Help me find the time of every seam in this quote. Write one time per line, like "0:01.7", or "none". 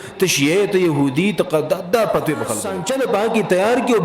0:02.7